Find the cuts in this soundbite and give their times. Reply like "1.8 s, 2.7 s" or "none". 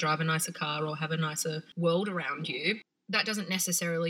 1.7 s, 2.9 s